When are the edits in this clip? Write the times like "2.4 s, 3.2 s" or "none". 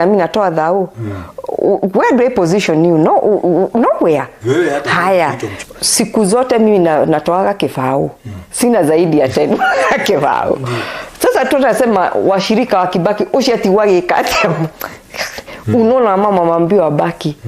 5.6 s